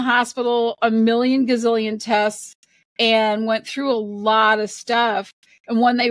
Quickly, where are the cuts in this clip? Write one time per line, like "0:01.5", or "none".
none